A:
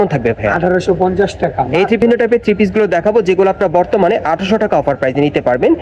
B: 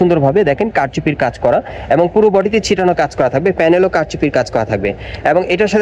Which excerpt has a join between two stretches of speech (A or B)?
A